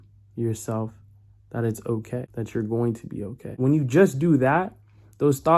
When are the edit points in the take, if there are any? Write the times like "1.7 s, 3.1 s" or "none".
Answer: 2.3 s, 3.6 s

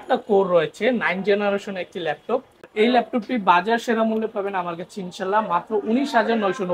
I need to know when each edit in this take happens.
2.7 s

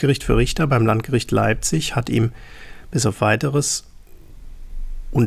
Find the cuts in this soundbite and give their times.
none

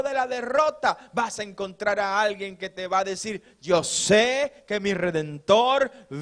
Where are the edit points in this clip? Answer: none

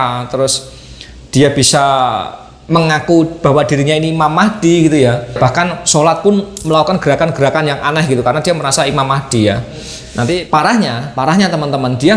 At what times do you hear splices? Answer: 5.4 s, 10.4 s

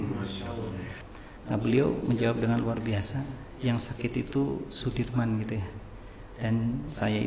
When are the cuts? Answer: 1.0 s

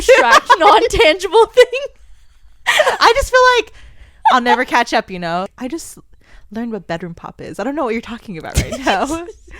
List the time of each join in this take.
5.5 s

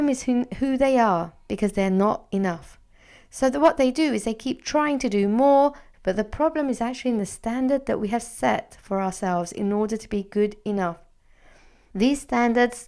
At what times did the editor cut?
5.9 s, 11.8 s

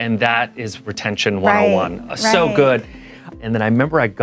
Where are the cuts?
3.3 s

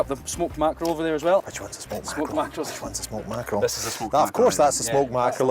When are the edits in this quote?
1.5 s

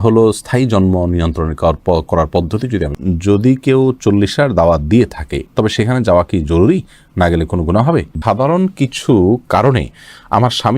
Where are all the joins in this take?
3.0 s, 8.1 s

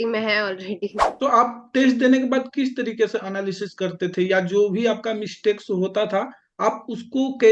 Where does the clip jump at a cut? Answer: 1.0 s

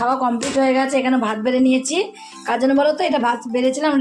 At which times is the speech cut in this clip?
none

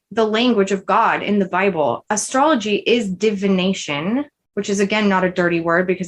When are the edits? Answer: 2.0 s, 4.4 s

